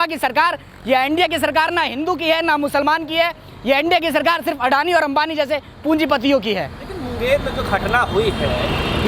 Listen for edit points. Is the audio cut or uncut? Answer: uncut